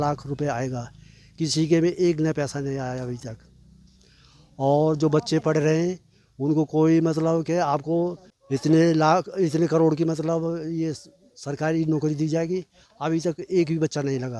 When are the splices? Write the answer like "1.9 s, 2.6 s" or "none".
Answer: none